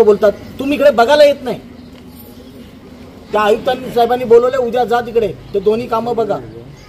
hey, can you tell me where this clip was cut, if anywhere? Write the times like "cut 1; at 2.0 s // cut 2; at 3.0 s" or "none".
cut 1; at 3.3 s